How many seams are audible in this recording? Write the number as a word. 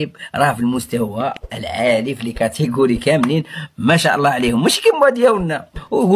zero